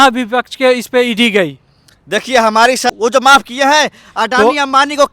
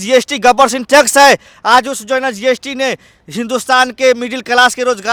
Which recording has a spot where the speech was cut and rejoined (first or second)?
first